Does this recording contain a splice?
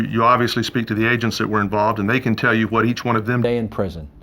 yes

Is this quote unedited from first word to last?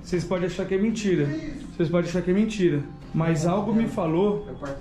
no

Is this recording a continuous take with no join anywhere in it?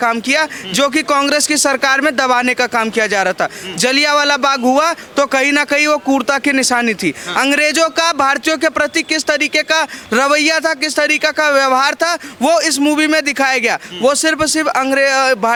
yes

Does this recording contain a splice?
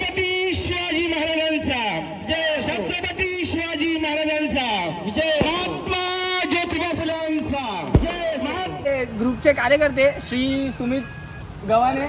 yes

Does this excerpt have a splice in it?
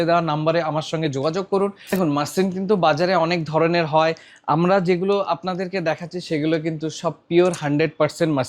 yes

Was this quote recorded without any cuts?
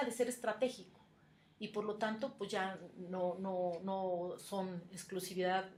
yes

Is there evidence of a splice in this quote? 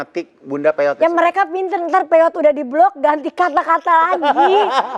no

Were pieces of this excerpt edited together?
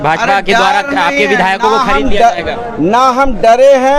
no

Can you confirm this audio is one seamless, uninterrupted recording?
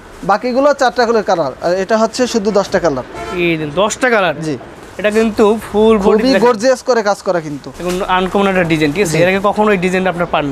yes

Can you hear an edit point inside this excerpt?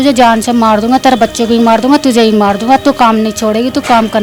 no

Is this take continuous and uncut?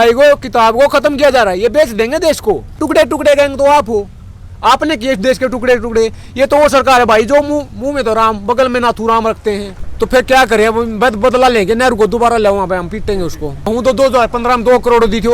no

